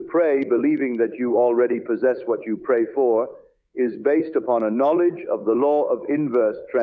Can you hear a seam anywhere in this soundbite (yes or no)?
no